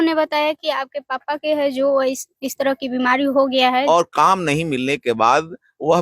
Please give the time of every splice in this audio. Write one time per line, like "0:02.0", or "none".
0:03.8